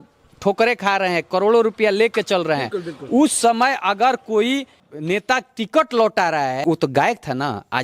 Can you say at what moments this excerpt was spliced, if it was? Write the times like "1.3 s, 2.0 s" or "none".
4.9 s, 6.6 s